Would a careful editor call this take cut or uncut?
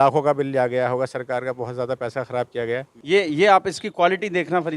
cut